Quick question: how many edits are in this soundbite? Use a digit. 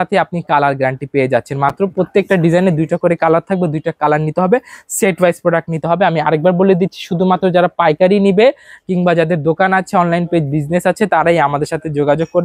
0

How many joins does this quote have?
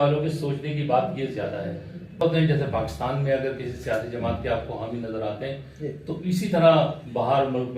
1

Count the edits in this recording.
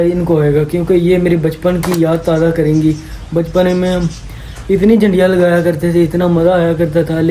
0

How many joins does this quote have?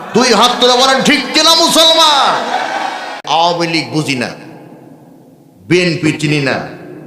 1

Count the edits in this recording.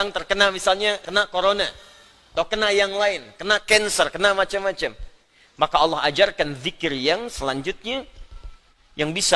1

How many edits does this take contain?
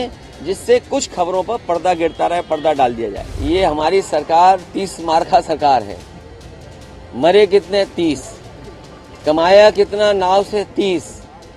1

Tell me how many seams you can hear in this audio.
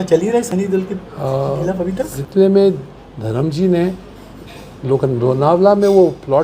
1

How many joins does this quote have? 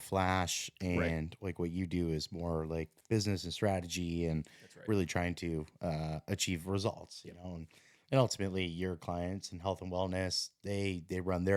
0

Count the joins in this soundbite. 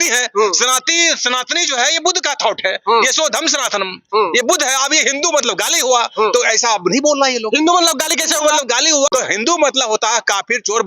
1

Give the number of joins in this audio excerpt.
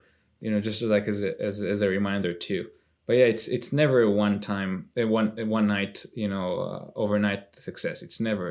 0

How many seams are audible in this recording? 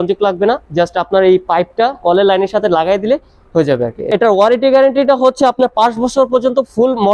1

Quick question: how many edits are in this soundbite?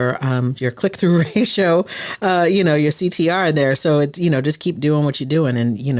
0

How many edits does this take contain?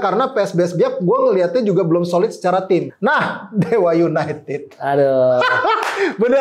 1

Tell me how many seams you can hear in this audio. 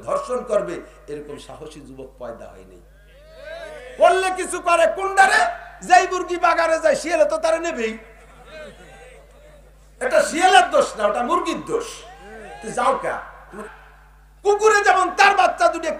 1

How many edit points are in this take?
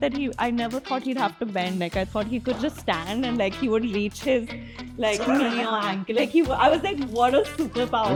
0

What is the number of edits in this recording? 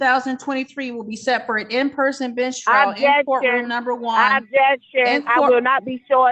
0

